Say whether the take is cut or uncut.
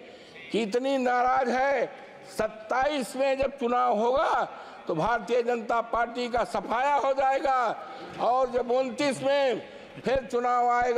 uncut